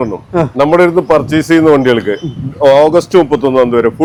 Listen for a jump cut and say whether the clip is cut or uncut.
uncut